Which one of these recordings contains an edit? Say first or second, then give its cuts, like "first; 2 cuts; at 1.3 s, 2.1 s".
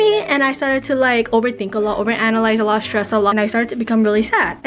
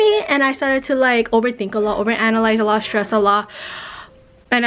first; 1 cut; at 3.3 s